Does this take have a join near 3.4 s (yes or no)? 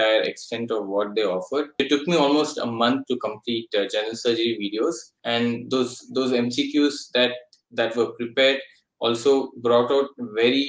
no